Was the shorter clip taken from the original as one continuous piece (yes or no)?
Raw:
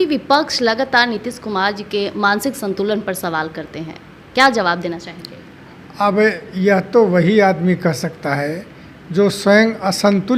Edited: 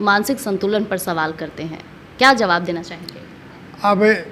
yes